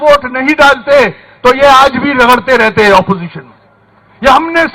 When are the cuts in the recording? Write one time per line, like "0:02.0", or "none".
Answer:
none